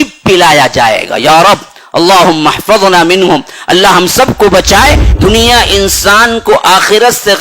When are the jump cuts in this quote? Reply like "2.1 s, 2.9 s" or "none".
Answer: 5.1 s